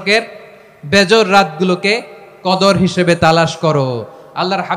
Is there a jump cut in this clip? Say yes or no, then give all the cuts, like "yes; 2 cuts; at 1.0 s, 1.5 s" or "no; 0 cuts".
no; 0 cuts